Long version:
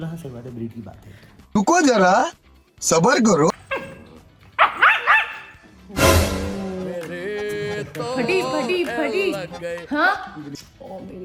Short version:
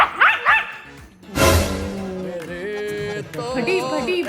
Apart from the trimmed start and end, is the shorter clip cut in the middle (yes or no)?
no